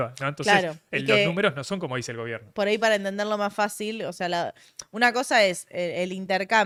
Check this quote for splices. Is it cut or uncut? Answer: uncut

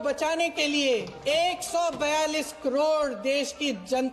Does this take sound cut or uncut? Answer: cut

